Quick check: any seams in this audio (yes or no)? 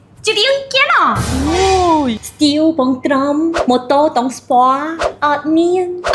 yes